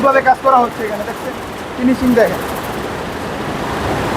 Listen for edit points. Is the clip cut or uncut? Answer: uncut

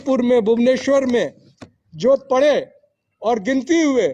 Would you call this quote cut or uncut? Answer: uncut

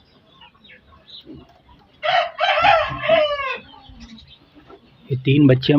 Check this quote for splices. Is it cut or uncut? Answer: uncut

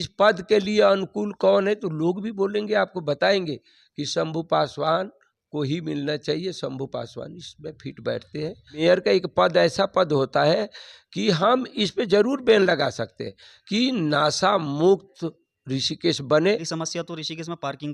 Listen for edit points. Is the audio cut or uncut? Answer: cut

